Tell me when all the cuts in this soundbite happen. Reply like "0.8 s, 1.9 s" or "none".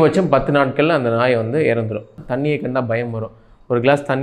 2.2 s